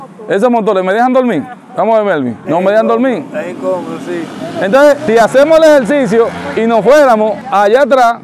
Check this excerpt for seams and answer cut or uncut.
uncut